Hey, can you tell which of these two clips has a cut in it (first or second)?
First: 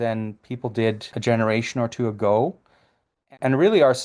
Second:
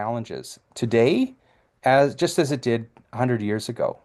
first